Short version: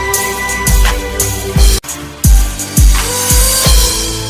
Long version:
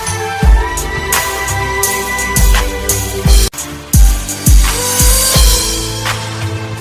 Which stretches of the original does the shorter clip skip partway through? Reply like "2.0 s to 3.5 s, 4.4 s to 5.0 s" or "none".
none